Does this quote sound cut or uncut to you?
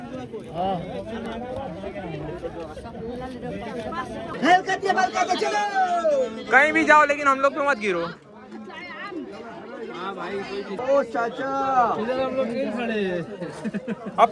cut